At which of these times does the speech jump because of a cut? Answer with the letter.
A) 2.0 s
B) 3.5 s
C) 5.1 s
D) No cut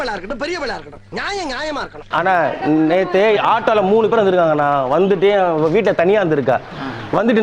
A